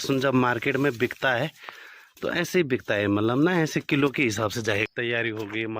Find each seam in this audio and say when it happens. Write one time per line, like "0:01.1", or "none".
0:04.9